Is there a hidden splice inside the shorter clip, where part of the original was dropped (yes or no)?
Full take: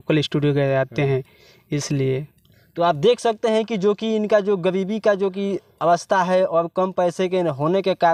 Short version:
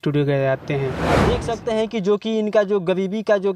yes